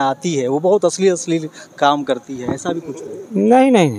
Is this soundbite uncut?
yes; 0 cuts

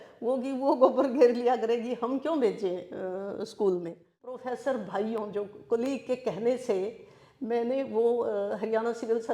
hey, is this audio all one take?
no; 1 cut; at 4.5 s

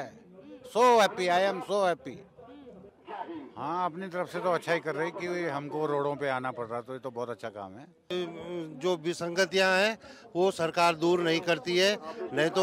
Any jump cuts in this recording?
yes; 2 cuts; at 3.0 s, 8.0 s

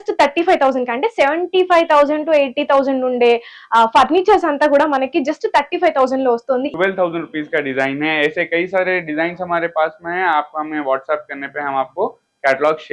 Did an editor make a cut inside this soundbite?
yes; 1 cut; at 6.7 s

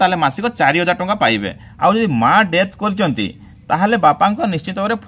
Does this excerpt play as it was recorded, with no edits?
no; 1 cut; at 1.6 s

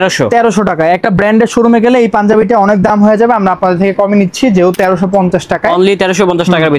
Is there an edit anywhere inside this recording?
yes; 1 cut; at 4.7 s

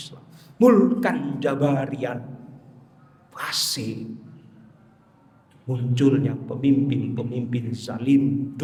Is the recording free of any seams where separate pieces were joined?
yes; 0 cuts

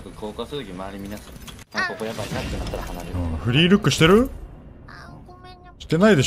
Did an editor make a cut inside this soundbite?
yes; 1 cut; at 1.5 s

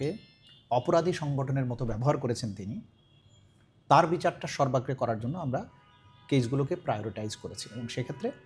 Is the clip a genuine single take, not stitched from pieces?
yes; 0 cuts

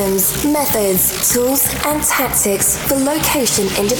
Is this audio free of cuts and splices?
yes; 0 cuts

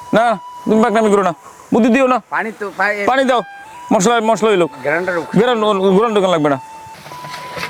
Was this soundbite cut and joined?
no; 0 cuts

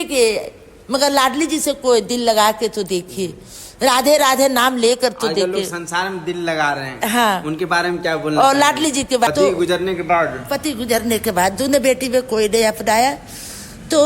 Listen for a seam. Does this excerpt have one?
yes; 1 cut; at 9.3 s

